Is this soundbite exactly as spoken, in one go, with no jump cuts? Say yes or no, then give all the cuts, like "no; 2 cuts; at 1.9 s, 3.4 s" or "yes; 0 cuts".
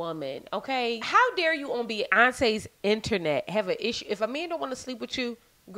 no; 1 cut; at 1.0 s